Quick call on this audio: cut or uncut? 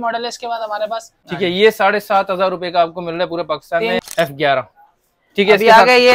cut